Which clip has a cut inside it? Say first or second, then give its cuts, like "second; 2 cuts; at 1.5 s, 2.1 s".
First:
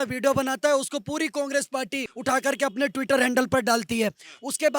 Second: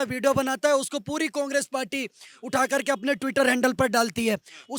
first; 1 cut; at 2.1 s